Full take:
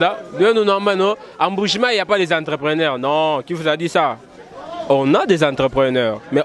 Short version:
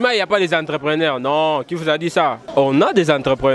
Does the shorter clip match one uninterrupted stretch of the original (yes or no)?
no